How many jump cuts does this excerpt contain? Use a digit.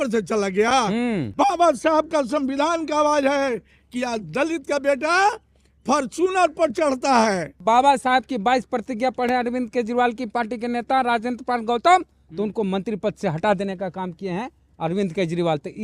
2